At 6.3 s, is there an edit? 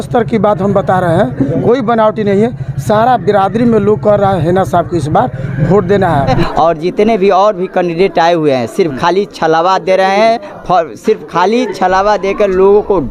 yes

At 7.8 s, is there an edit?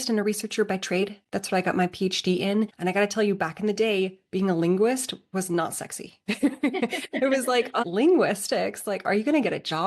yes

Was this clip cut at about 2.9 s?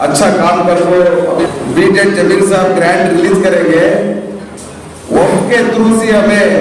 no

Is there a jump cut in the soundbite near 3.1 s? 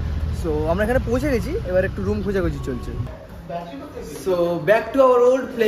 yes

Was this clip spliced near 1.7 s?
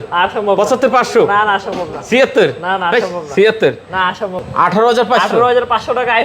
no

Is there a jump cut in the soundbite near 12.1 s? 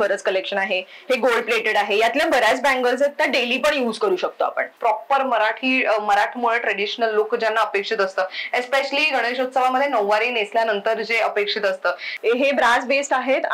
yes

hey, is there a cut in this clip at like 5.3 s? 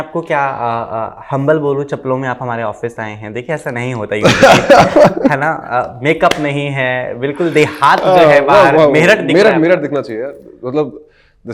no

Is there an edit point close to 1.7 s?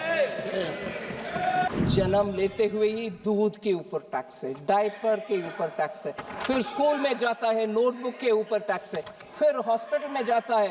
yes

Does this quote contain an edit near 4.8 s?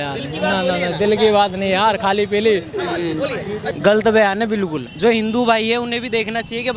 yes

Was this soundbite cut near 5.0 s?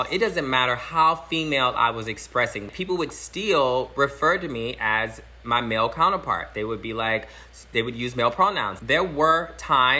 no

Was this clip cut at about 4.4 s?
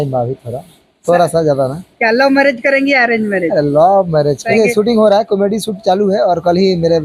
yes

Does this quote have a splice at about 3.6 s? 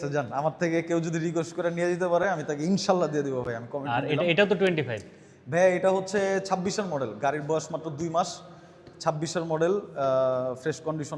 no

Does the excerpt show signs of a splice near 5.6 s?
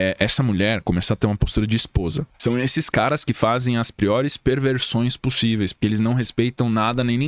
no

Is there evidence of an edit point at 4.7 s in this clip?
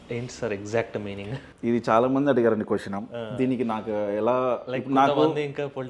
no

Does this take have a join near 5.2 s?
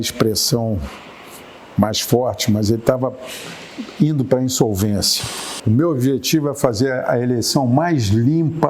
yes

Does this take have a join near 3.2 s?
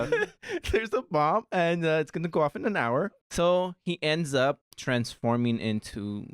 yes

